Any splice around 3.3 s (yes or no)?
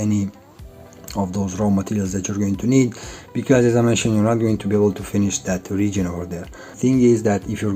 no